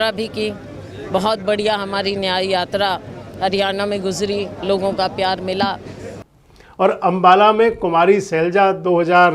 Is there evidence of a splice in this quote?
yes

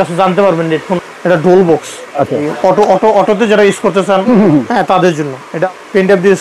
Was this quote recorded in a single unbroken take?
no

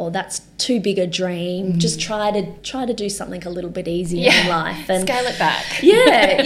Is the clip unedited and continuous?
yes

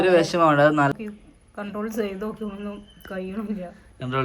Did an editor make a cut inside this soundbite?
yes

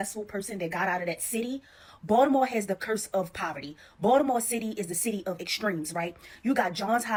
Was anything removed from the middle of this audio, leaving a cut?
no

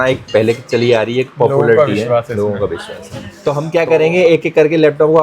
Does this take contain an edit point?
yes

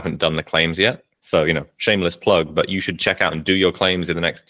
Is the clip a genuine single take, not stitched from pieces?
no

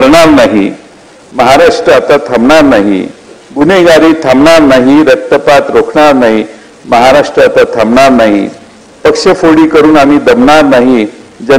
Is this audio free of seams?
yes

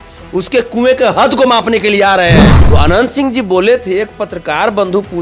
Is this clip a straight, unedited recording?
no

